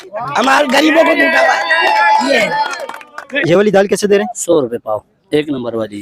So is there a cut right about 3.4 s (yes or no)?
yes